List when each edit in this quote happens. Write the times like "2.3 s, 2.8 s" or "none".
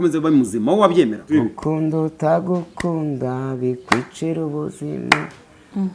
1.3 s

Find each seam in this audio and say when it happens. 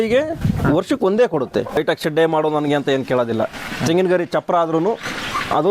1.8 s

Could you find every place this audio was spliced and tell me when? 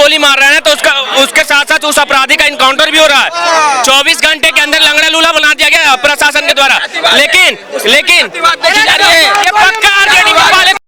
none

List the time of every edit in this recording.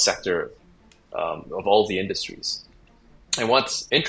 none

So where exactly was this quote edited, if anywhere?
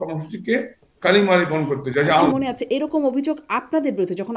2.3 s

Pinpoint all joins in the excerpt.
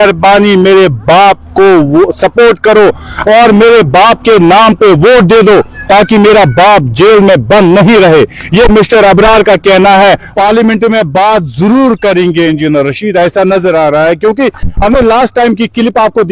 none

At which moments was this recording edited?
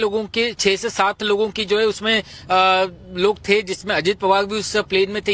none

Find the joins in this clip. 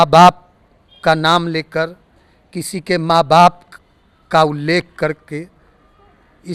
none

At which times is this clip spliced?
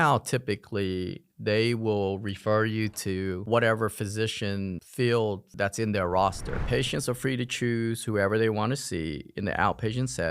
5.5 s, 6.6 s

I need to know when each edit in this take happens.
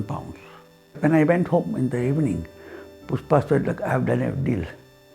1.0 s

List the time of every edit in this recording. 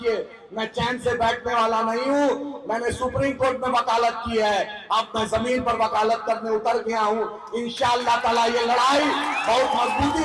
none

